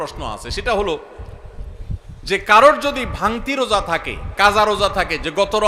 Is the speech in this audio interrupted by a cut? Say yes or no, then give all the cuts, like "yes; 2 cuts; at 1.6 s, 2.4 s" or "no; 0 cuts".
no; 0 cuts